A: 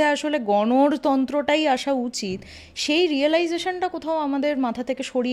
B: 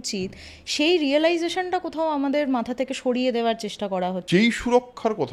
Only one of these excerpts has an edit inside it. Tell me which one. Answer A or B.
B